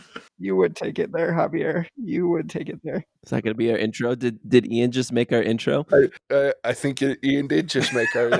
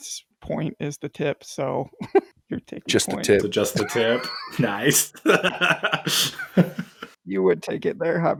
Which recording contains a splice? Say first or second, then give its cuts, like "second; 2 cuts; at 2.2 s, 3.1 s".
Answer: first; 1 cut; at 6.2 s